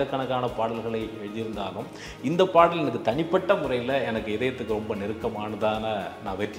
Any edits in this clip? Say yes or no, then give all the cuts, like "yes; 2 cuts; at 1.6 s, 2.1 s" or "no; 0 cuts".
no; 0 cuts